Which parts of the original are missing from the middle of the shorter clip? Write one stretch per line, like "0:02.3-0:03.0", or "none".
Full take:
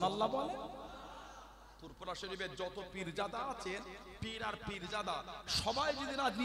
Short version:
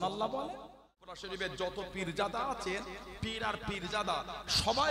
0:01.2-0:02.2